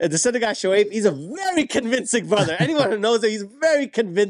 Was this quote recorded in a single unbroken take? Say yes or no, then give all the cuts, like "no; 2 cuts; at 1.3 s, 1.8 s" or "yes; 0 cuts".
yes; 0 cuts